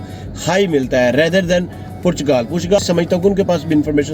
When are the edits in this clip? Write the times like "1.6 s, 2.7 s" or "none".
2.8 s